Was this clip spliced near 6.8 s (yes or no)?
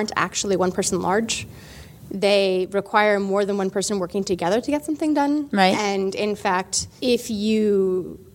yes